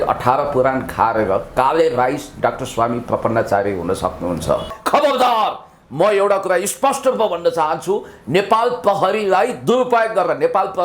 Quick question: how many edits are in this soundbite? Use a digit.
1